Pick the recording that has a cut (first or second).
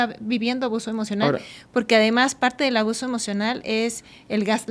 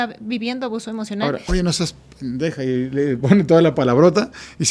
second